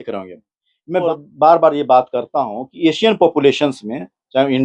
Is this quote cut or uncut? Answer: cut